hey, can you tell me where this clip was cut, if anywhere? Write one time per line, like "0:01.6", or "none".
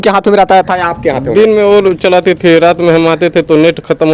none